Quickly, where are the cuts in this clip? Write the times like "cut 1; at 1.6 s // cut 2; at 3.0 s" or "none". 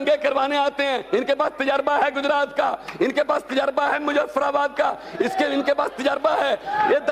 none